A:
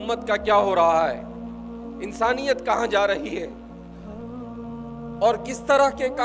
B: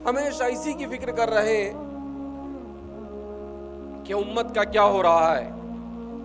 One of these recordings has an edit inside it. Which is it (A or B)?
A